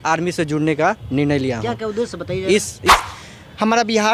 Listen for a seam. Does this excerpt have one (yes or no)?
yes